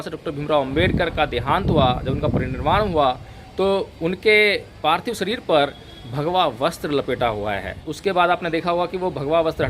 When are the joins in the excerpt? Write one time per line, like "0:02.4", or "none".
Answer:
0:07.9